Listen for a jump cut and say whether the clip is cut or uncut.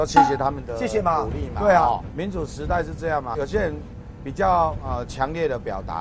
cut